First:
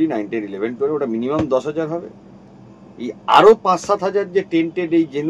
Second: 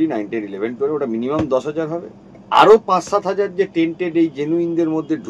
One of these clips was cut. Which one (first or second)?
second